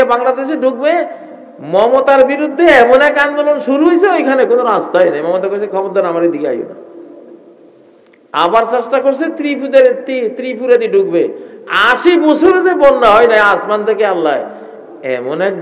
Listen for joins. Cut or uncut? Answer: uncut